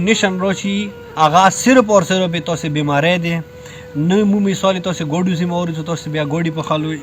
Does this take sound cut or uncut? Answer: cut